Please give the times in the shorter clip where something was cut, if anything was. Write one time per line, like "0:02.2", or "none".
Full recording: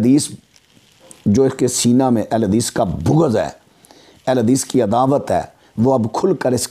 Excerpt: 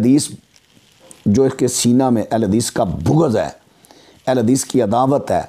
none

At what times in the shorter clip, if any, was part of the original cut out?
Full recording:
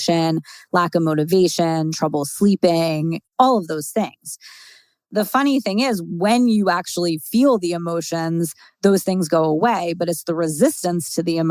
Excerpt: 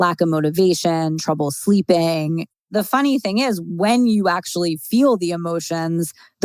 0:02.5

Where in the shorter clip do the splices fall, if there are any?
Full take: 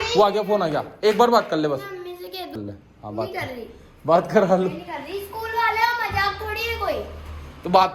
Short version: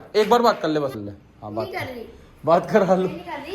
0:00.9

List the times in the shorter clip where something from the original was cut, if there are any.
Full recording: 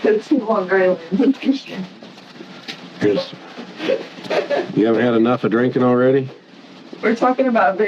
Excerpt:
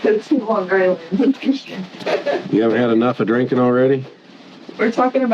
0:01.9

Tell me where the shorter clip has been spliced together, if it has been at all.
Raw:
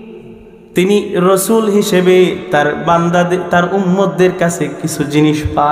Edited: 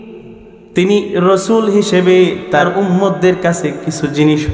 0:02.7

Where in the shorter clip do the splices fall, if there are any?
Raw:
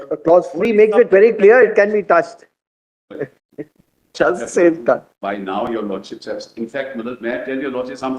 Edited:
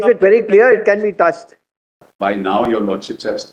0:02.1

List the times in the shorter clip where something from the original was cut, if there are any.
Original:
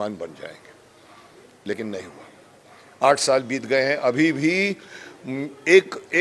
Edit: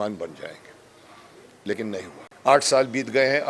0:02.2

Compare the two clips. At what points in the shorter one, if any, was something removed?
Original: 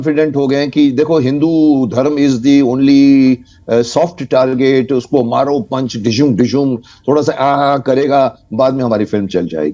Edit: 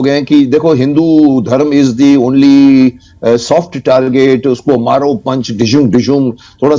none

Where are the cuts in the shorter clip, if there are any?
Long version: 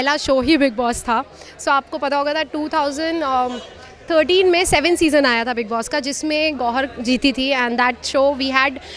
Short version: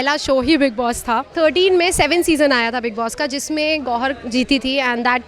0:01.3

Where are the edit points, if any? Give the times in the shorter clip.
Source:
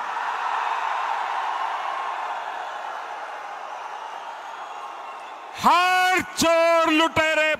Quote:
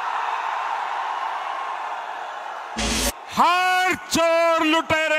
0:02.9

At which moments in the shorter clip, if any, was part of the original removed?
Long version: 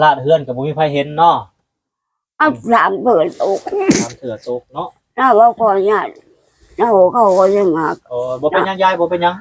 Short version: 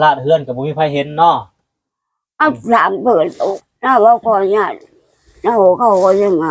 0:03.6

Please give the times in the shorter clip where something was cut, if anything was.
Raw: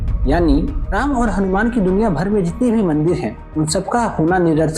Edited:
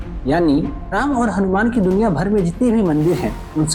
none

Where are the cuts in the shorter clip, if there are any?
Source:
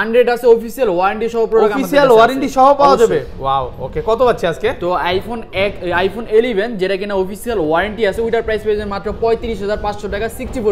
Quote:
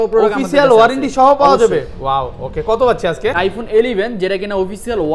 0:03.4

